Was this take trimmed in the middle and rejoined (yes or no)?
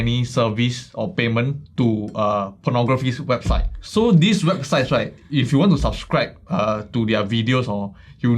yes